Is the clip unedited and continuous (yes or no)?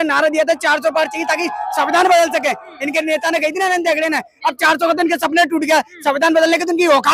yes